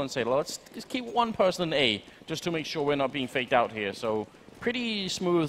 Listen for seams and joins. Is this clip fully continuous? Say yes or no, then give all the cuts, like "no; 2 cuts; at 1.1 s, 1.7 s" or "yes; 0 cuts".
no; 1 cut; at 3.8 s